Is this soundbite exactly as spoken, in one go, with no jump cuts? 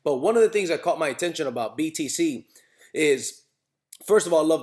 no; 1 cut; at 1.5 s

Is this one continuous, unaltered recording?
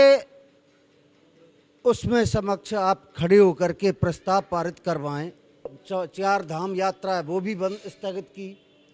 no; 1 cut; at 5.8 s

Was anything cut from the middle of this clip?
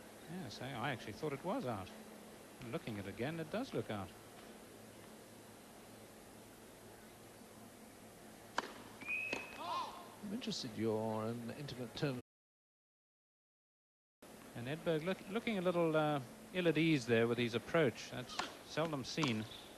no; 0 cuts

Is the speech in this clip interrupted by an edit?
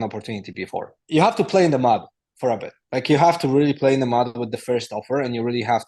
yes; 1 cut; at 1.0 s

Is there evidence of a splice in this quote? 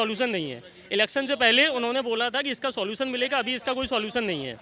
no; 0 cuts

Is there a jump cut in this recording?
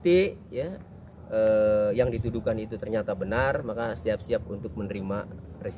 no; 0 cuts

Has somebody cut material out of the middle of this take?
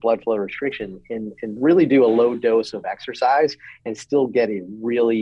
no; 0 cuts

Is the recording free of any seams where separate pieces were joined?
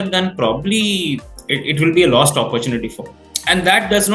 no; 1 cut; at 3.2 s

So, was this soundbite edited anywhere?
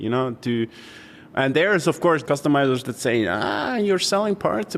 yes; 1 cut; at 2.2 s

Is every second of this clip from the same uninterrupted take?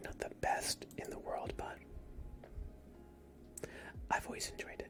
yes; 0 cuts

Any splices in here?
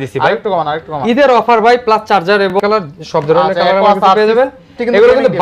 yes; 1 cut; at 2.6 s

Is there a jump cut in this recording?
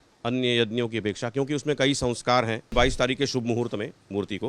yes; 1 cut; at 2.7 s

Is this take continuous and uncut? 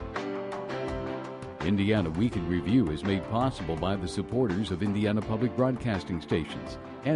no; 1 cut; at 1.5 s

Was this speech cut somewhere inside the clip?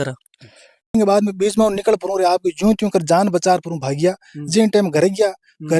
yes; 1 cut; at 0.9 s

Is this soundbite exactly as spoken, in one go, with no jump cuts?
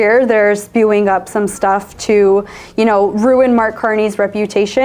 yes; 0 cuts

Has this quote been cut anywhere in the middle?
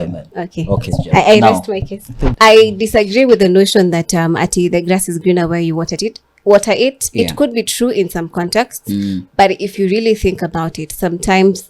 yes; 1 cut; at 2.2 s

